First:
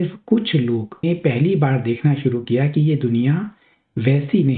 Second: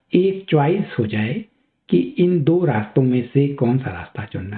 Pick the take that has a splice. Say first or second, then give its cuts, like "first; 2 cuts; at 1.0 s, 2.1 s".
first; 1 cut; at 1.0 s